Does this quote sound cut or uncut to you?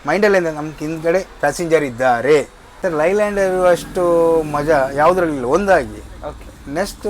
cut